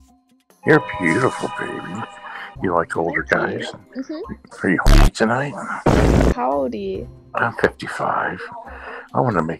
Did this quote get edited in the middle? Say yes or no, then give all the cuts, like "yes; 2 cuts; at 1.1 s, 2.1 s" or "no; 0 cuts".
yes; 1 cut; at 4.4 s